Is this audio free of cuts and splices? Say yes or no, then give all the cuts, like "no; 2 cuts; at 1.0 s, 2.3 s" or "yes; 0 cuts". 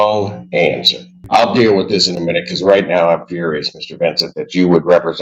no; 1 cut; at 1.1 s